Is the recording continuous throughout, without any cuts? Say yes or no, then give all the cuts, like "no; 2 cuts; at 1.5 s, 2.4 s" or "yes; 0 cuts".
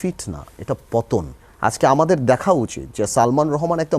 no; 1 cut; at 1.4 s